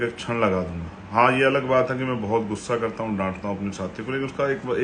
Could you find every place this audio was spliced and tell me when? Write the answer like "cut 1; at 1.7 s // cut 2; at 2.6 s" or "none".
none